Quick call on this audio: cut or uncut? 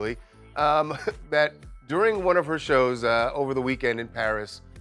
uncut